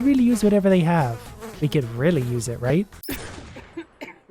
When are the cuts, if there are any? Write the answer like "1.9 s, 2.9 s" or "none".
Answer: 3.0 s